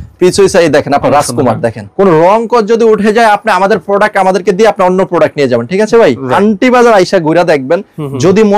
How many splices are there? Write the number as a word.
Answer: two